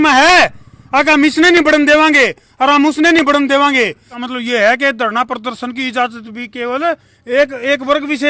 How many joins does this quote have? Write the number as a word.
one